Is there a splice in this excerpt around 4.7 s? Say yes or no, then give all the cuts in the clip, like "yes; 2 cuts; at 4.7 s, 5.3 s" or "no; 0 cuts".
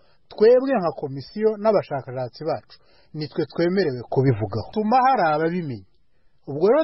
yes; 1 cut; at 4.7 s